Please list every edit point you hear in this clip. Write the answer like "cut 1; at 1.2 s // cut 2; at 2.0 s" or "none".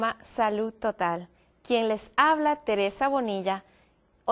cut 1; at 1.5 s